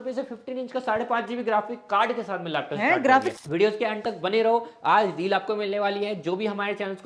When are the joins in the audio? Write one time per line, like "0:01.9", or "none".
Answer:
0:03.3

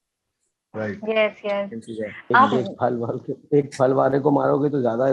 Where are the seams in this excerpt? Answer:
none

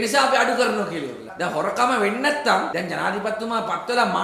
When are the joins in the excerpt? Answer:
0:01.3
0:02.7

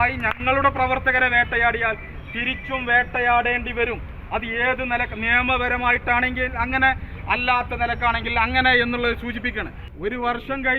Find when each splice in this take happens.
0:09.8

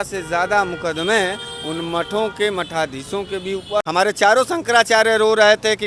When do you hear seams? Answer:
0:03.8

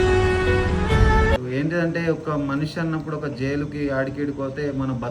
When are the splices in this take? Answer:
0:01.4

